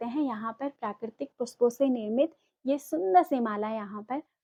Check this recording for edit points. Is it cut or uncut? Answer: uncut